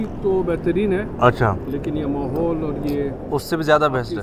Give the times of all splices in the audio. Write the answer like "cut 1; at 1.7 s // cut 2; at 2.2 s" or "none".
none